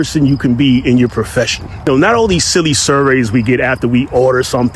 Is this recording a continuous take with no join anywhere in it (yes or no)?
no